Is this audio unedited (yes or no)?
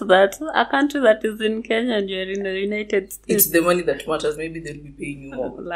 yes